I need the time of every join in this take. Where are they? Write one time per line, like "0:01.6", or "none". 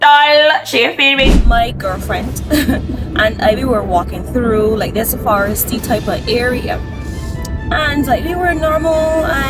0:01.4

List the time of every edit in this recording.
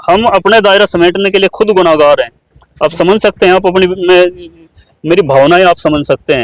none

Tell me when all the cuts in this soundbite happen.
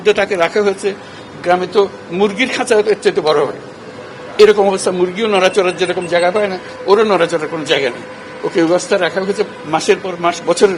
none

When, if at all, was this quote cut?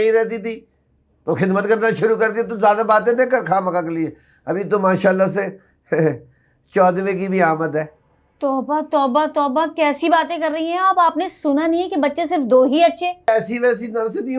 0:13.3

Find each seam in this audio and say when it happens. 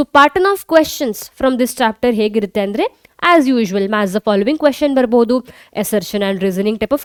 none

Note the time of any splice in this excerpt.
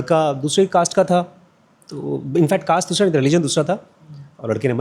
none

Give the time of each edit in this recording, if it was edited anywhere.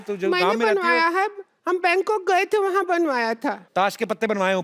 0:03.6

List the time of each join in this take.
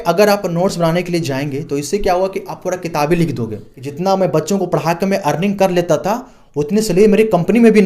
0:03.8

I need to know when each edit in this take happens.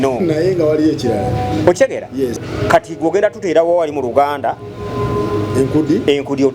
0:02.4

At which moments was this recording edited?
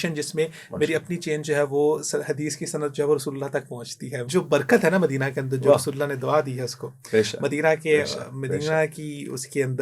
0:04.2

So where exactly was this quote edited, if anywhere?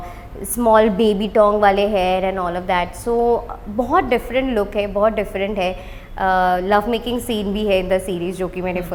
none

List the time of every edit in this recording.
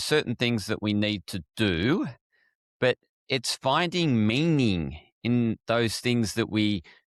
none

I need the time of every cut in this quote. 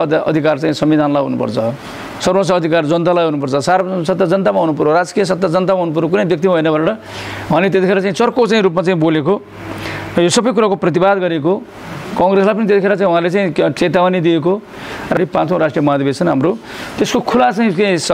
0:13.7
0:15.2

